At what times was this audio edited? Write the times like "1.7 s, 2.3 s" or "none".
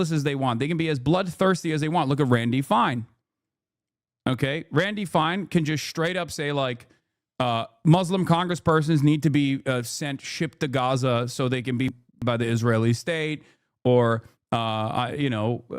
12.2 s